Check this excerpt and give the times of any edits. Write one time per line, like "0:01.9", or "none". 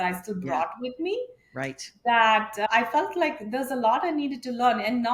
none